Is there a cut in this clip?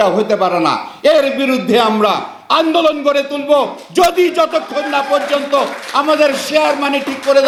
no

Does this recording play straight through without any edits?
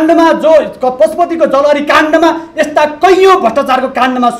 yes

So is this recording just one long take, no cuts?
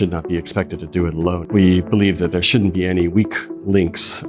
no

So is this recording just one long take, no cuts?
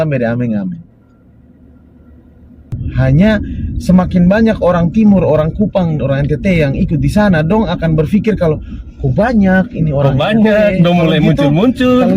no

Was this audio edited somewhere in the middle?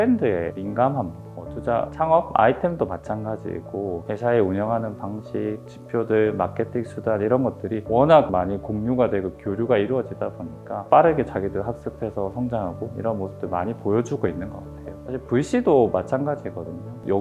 no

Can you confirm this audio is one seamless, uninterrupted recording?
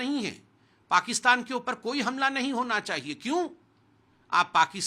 yes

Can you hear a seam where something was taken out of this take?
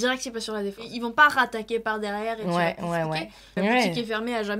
yes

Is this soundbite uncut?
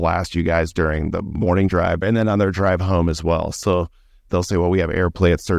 no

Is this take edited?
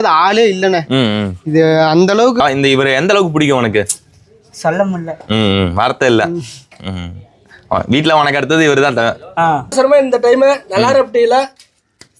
yes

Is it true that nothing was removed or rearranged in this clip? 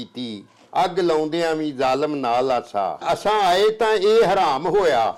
yes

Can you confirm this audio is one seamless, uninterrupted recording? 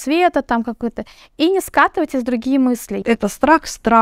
no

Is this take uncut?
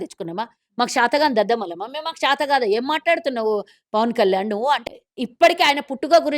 no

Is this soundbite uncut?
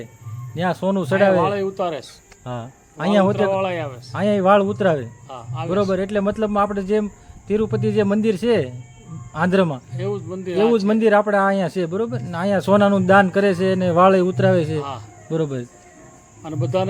yes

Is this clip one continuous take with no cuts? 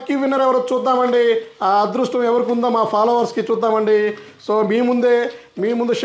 yes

